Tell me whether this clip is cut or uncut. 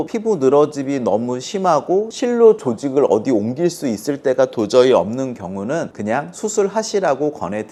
uncut